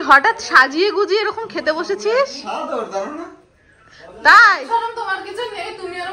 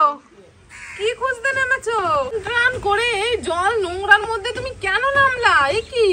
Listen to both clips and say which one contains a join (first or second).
second